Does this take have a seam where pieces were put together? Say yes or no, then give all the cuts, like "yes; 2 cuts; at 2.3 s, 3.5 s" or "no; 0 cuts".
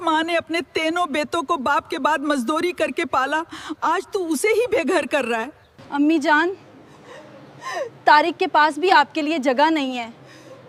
no; 0 cuts